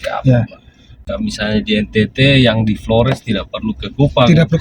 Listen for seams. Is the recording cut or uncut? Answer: cut